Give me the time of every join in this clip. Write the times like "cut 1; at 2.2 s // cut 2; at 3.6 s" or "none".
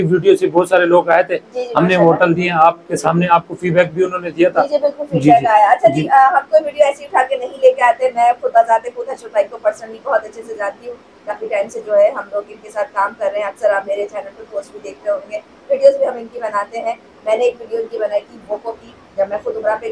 none